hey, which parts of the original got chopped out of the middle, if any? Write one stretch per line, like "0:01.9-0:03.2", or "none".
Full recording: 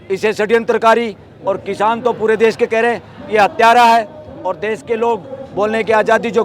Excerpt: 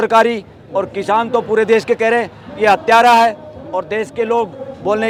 none